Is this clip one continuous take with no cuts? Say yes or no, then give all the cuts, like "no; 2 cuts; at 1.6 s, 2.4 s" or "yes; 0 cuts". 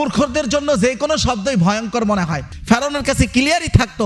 no; 1 cut; at 2.6 s